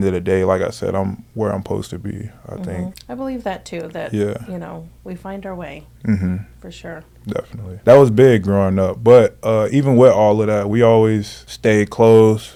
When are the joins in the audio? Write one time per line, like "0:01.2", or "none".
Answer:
none